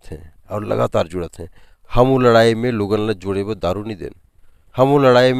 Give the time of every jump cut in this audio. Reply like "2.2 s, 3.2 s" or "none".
none